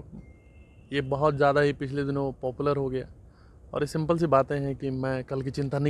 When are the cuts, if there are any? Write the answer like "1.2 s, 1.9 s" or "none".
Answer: none